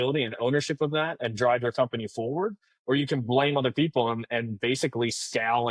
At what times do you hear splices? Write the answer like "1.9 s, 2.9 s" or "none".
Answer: none

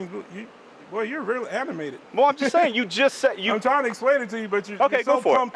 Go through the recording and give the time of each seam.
none

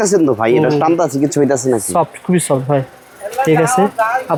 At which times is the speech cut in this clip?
none

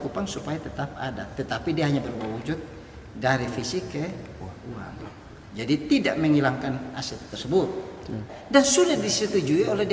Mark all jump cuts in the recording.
8.3 s

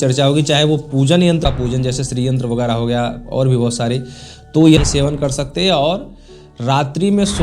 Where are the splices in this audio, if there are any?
1.4 s, 4.8 s

